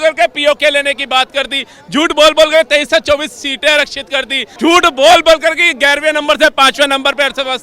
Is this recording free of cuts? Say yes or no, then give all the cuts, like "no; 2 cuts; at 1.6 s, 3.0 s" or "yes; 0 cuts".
no; 1 cut; at 4.4 s